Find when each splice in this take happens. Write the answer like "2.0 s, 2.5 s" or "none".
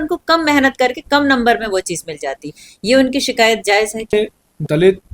4.1 s

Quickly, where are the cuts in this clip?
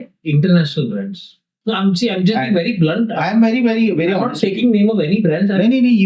1.5 s

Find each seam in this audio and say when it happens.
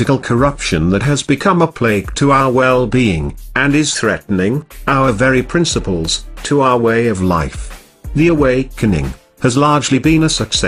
none

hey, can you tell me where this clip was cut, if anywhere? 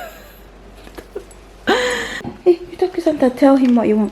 2.3 s

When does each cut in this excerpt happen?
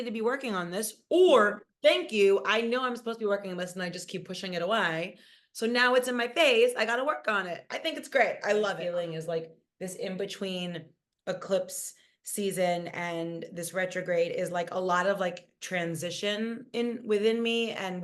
8.8 s

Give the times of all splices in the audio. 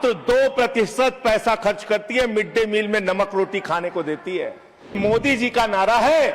5.0 s

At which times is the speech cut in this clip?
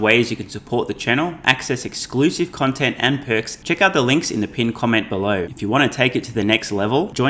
3.5 s, 5.5 s

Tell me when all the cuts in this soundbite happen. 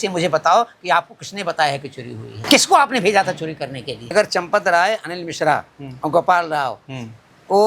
2.3 s, 4.1 s

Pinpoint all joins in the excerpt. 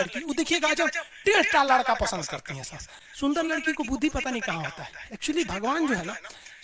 none

